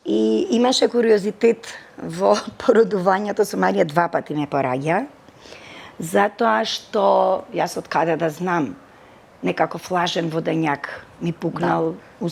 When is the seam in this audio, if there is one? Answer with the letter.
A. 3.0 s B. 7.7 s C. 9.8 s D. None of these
D